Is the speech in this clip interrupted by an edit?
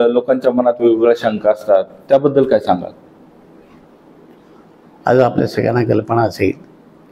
no; 0 cuts

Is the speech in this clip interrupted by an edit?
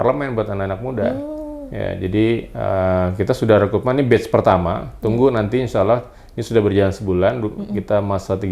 no; 0 cuts

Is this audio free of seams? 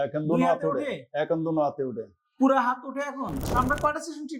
no; 1 cut; at 3.4 s

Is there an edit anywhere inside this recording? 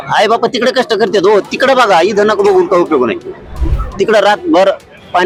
no; 0 cuts

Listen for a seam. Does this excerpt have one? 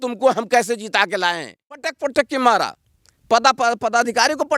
yes; 1 cut; at 2.0 s

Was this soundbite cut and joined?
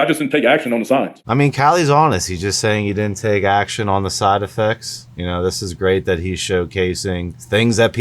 yes; 1 cut; at 1.2 s

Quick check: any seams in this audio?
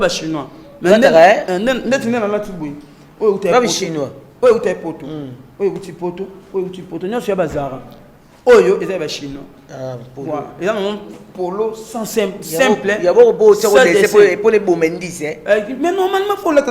no; 0 cuts

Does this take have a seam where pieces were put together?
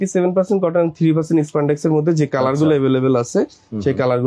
no; 0 cuts

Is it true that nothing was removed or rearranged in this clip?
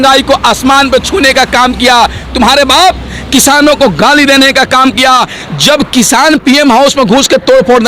no; 1 cut; at 5.4 s

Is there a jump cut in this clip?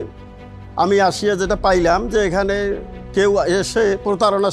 no; 0 cuts

